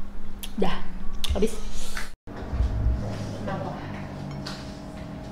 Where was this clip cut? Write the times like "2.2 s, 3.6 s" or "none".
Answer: 2.0 s